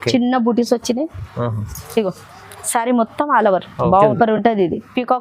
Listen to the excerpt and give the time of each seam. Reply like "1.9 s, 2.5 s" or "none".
4.1 s